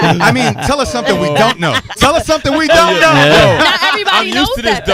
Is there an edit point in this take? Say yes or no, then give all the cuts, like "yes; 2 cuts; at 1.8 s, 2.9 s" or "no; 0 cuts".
no; 0 cuts